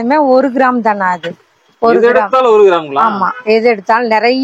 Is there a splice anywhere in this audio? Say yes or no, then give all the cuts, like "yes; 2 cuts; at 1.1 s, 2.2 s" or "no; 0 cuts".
no; 0 cuts